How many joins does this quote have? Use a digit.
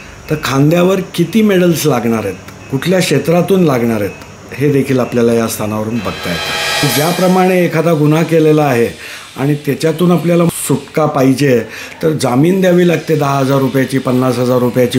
2